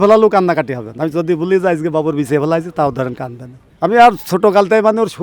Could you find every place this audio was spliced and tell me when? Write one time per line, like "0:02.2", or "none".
none